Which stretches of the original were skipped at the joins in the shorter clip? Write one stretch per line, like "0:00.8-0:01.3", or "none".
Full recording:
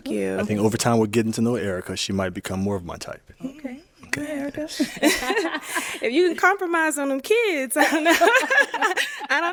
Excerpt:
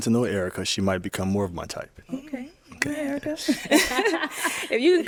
none